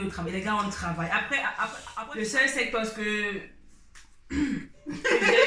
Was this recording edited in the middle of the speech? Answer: yes; 1 cut; at 1.8 s

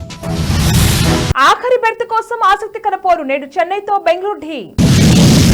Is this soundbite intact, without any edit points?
no; 1 cut; at 1.1 s

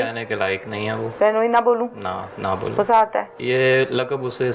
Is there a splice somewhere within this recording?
yes; 2 cuts; at 1.0 s, 3.3 s

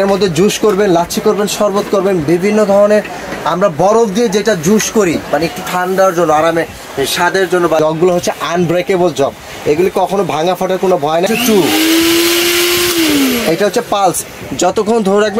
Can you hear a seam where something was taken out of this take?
yes; 2 cuts; at 7.8 s, 11.3 s

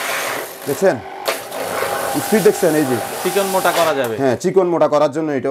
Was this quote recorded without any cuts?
yes; 0 cuts

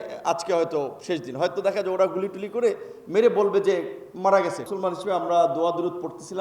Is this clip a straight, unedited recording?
no; 2 cuts; at 1.6 s, 4.6 s

